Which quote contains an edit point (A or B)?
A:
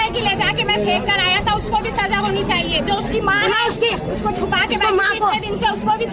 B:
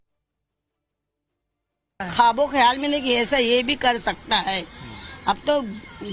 B